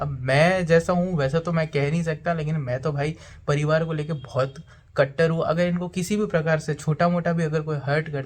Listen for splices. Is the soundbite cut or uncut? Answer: uncut